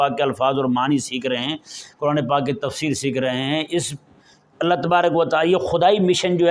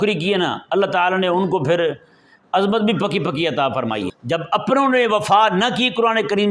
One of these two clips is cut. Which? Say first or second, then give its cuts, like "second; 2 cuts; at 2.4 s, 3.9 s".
second; 1 cut; at 4.1 s